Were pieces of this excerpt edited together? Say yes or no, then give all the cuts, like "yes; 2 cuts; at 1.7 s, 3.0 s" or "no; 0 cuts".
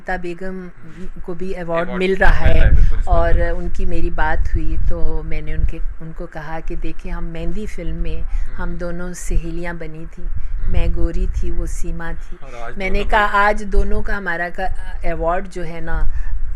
no; 0 cuts